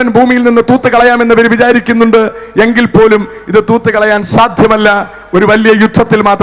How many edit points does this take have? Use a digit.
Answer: 0